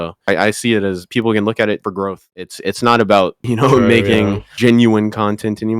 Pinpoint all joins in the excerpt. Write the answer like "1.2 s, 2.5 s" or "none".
2.2 s

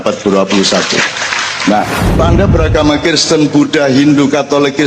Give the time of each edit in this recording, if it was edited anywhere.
2.2 s

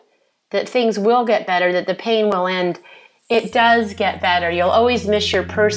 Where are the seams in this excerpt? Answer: none

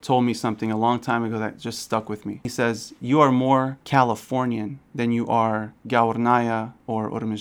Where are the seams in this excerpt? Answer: 2.5 s

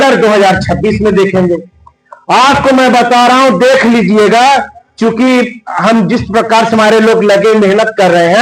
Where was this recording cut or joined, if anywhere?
none

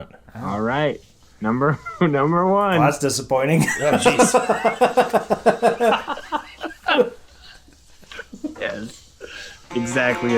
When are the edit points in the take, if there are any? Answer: 8.2 s

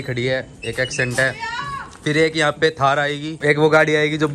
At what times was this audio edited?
3.3 s

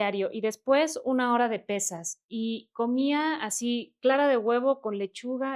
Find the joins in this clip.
none

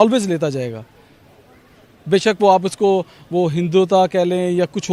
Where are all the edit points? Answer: none

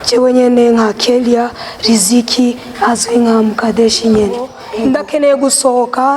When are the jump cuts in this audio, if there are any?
4.6 s

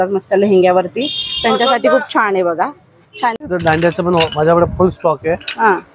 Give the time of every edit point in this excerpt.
3.4 s

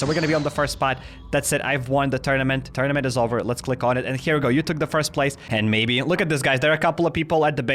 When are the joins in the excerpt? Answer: 2.7 s, 5.4 s

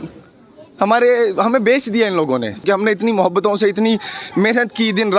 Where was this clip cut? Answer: 2.6 s

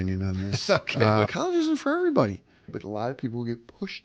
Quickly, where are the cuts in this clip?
1.2 s, 2.7 s

